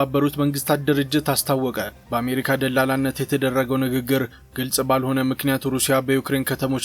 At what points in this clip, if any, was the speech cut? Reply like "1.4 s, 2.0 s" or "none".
2.0 s